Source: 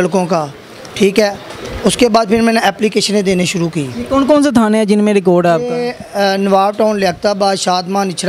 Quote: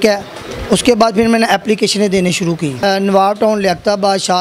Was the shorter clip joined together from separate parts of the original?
yes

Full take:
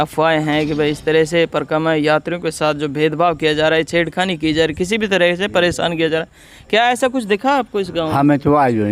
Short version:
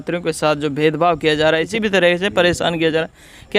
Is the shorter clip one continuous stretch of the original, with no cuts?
no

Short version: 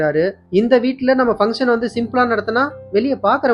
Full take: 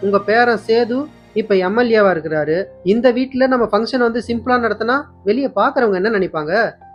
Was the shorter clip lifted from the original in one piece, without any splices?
yes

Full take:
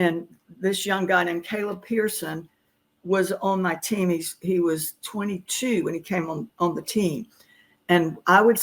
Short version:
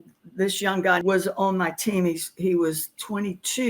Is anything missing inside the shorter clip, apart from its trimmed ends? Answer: yes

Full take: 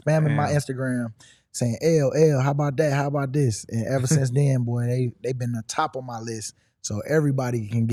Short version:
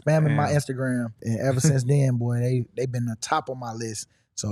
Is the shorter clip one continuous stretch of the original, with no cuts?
no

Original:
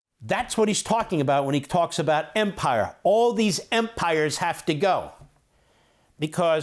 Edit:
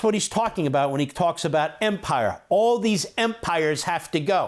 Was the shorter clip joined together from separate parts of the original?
no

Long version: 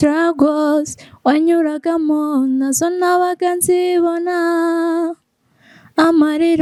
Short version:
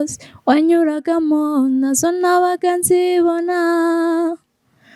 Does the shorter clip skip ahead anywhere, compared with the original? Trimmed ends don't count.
no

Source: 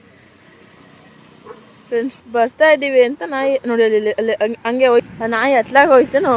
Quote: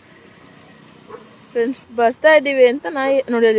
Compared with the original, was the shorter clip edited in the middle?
no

